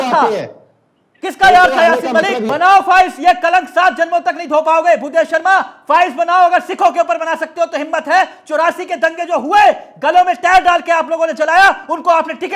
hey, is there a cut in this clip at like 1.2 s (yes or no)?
no